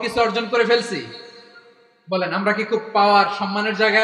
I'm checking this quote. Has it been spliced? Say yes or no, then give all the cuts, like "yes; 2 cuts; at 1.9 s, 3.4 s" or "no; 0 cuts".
no; 0 cuts